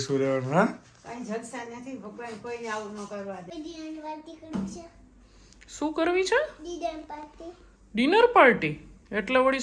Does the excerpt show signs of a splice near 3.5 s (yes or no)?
yes